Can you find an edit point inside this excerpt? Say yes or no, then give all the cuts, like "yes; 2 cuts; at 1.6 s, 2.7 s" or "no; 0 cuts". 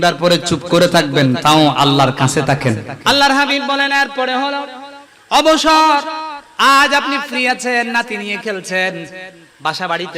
yes; 1 cut; at 2.9 s